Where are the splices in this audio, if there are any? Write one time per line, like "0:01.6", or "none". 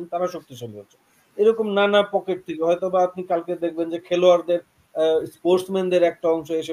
none